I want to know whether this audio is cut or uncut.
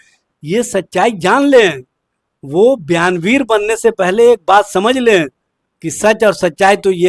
uncut